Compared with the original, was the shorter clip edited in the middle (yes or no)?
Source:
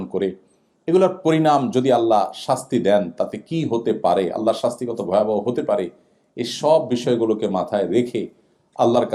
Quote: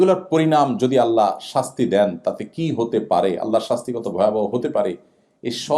no